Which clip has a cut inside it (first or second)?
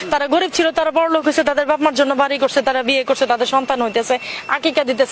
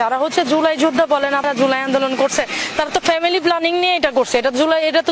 second